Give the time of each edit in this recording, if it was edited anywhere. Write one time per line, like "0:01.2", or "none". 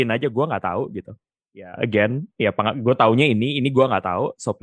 none